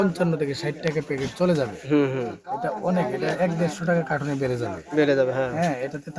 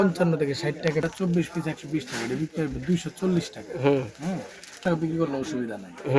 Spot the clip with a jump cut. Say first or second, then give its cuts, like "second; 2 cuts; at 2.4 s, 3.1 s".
second; 2 cuts; at 1.0 s, 4.8 s